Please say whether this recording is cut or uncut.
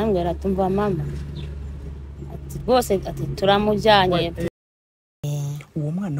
cut